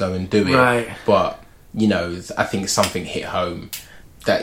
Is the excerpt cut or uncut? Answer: uncut